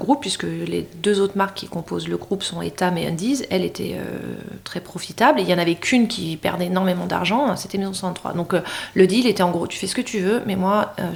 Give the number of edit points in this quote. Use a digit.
0